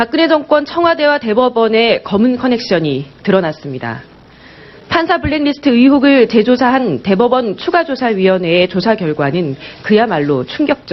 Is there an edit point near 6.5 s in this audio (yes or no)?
yes